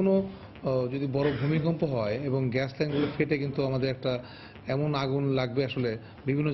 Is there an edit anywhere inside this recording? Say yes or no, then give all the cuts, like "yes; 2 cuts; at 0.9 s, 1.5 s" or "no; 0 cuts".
no; 0 cuts